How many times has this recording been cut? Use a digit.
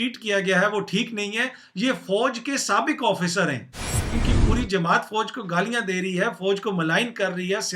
1